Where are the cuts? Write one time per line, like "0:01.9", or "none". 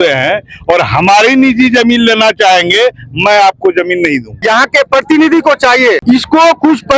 0:04.3
0:06.0